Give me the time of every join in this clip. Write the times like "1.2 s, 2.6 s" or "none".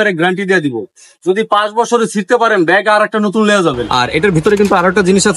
3.8 s